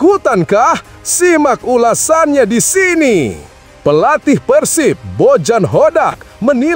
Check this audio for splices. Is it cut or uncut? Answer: uncut